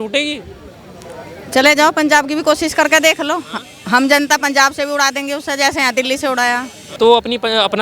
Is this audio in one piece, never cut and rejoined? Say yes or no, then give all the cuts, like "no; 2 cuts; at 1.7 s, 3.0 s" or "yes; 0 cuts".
no; 1 cut; at 6.8 s